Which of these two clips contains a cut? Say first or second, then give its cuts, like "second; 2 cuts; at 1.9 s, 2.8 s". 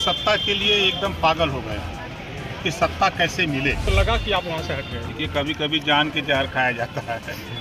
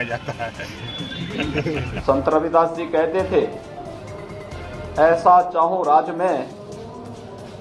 second; 1 cut; at 1.9 s